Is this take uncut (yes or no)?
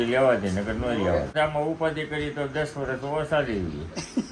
no